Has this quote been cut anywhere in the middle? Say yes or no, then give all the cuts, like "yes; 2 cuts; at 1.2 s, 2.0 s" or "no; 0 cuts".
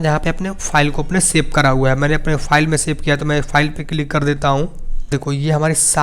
yes; 1 cut; at 5.1 s